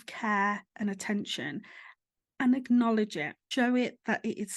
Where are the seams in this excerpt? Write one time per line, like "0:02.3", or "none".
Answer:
0:03.3